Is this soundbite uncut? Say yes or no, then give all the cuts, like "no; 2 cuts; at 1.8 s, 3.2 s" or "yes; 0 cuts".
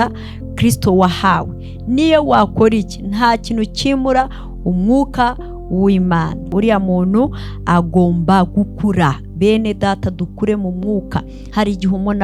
no; 1 cut; at 6.4 s